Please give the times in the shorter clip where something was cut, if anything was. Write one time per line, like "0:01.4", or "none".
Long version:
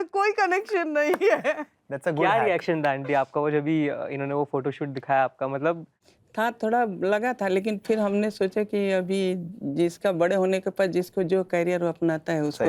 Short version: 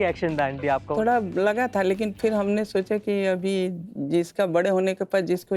0:00.9

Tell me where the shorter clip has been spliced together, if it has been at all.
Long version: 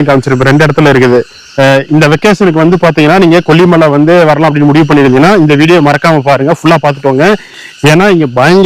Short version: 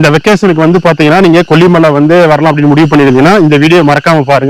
none

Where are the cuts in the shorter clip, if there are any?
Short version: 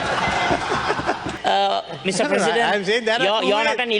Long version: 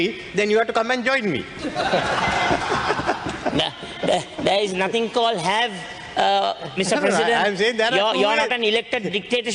0:01.3

